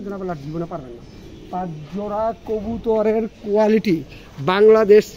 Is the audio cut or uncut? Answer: uncut